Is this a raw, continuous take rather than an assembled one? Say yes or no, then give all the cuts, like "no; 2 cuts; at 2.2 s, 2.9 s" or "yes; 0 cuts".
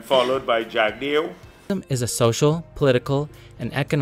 no; 1 cut; at 1.7 s